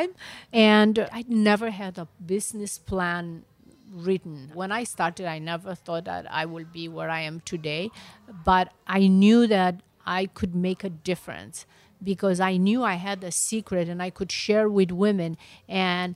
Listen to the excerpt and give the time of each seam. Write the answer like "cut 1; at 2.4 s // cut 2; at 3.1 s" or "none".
none